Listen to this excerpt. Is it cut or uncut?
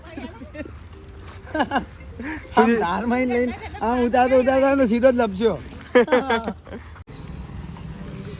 cut